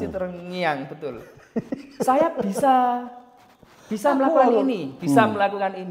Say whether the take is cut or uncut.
uncut